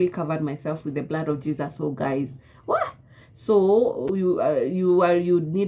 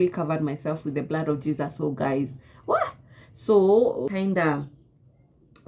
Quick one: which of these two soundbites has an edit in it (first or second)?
second